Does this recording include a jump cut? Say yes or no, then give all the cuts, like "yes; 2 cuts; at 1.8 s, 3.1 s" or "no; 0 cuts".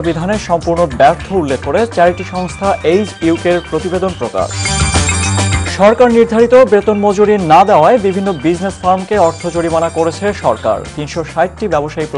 no; 0 cuts